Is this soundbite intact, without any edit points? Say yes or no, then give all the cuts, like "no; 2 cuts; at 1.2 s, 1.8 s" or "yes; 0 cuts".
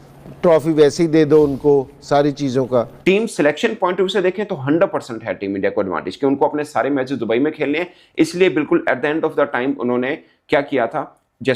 no; 1 cut; at 3.0 s